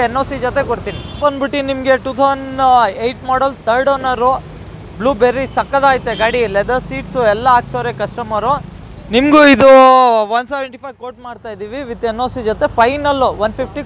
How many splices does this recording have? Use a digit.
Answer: 1